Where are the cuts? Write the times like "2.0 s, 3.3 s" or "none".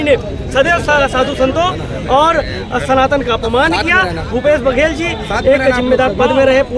none